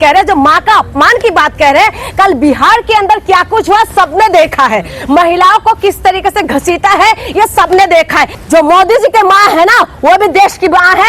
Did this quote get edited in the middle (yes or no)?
yes